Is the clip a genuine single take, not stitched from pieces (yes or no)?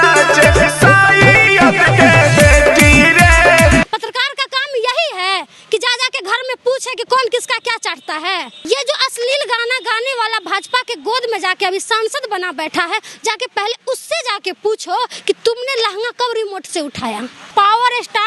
no